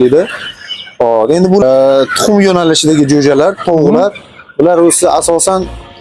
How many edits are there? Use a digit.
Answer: 1